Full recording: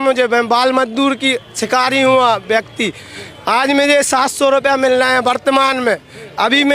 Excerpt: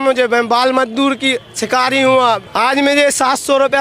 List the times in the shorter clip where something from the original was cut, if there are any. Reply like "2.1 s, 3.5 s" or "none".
2.4 s